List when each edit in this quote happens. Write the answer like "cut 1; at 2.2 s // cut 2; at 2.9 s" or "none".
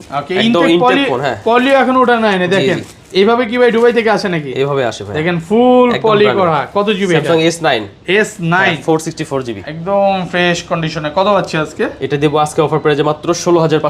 none